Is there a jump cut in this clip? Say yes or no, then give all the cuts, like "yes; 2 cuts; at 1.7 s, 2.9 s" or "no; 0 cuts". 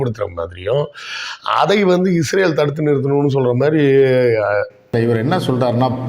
yes; 1 cut; at 4.9 s